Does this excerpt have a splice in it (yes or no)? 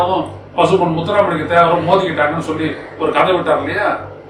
no